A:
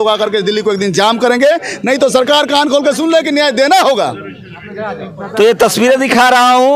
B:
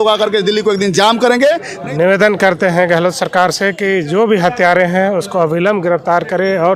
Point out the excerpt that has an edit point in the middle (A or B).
B